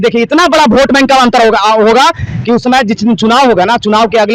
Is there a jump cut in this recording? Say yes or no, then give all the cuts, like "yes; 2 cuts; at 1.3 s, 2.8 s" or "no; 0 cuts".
no; 0 cuts